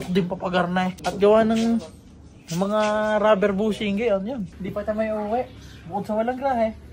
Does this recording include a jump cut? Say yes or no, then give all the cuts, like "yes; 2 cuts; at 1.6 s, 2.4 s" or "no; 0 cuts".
yes; 2 cuts; at 1.0 s, 4.6 s